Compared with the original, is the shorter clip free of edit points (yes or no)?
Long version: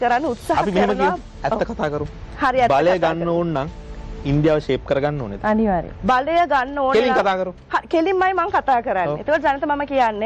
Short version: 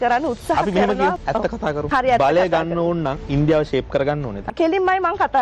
no